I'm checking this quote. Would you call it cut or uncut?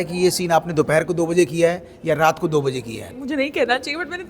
cut